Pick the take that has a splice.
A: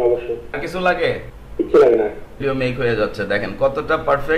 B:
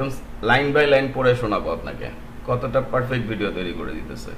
A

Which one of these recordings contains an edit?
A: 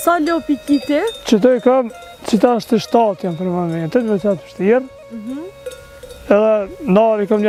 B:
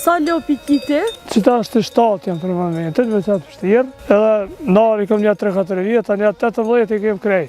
B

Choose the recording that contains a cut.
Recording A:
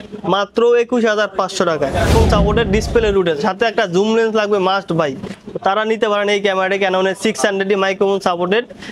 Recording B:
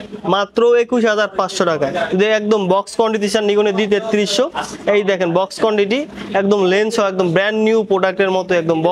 A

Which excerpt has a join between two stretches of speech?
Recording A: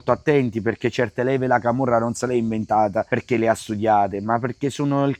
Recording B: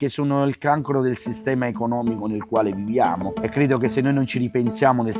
B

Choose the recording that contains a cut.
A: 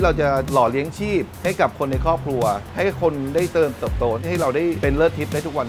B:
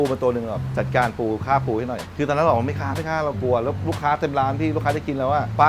A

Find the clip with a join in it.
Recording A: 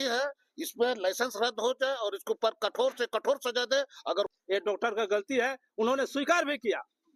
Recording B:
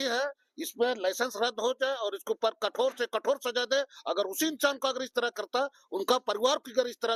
A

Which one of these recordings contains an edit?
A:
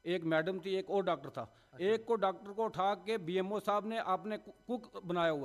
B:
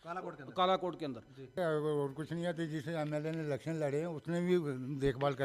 B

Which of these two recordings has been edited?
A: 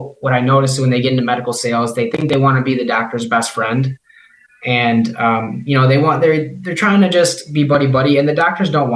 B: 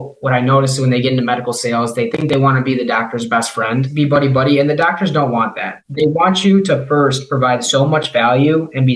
B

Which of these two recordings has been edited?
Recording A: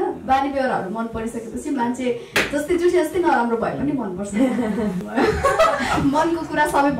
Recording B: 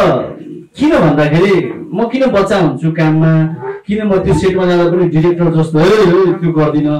A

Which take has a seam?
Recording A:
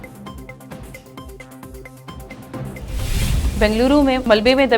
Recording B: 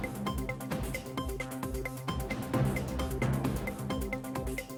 A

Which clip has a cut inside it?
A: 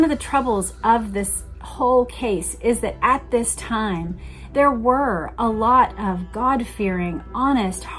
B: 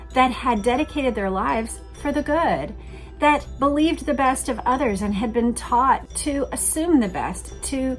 B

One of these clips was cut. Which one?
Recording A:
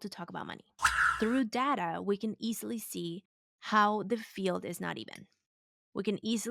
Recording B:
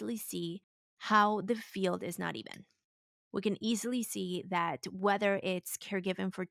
A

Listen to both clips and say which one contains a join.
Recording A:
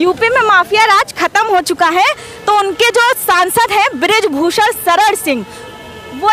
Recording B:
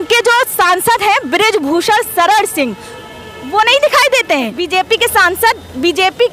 B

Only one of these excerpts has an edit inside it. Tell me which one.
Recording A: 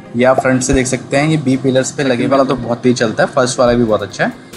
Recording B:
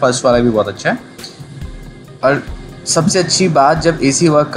A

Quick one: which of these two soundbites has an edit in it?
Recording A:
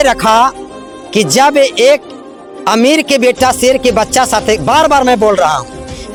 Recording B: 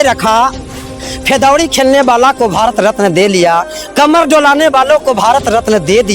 B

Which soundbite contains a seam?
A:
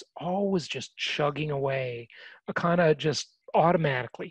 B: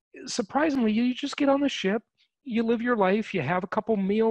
A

